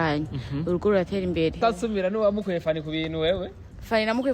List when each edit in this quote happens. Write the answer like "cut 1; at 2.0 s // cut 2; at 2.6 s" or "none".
cut 1; at 1.6 s